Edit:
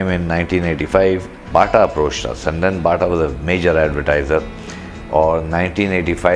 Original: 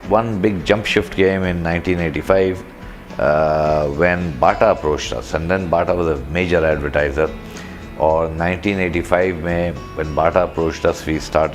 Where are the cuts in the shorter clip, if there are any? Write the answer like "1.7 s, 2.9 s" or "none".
1.4 s